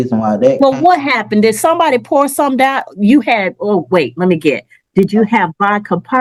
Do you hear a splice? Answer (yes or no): no